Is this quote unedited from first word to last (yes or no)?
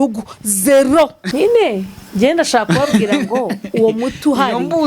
no